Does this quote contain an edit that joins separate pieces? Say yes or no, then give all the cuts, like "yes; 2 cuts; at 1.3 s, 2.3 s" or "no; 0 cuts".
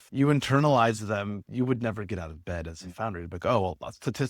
yes; 1 cut; at 1.4 s